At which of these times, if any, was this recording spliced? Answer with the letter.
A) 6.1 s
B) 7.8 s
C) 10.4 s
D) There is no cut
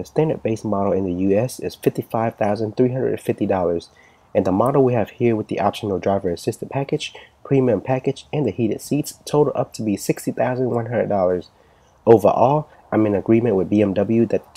A